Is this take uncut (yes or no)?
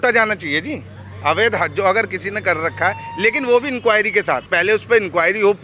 no